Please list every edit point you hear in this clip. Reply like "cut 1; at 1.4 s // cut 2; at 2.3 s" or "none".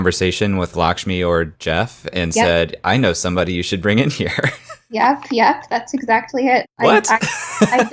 cut 1; at 6.7 s